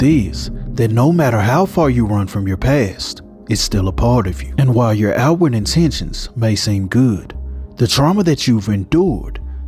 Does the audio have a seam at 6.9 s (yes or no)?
no